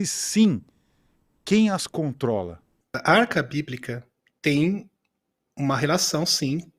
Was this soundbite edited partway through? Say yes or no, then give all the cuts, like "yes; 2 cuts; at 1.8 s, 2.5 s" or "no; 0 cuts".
yes; 1 cut; at 2.9 s